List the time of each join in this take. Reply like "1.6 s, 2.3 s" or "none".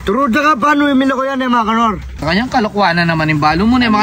2.2 s